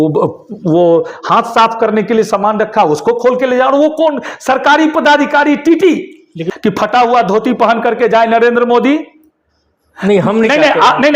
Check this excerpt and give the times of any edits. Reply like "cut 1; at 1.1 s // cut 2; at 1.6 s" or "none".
cut 1; at 6.4 s